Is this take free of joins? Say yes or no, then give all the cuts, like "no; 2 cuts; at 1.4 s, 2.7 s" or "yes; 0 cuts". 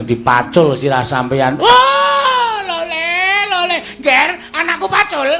yes; 0 cuts